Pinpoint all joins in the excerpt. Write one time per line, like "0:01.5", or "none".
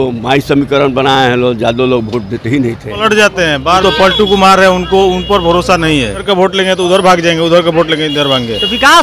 0:03.0
0:06.2